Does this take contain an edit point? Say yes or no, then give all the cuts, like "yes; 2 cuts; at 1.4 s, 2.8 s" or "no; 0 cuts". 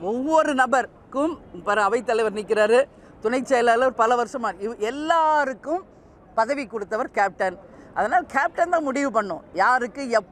no; 0 cuts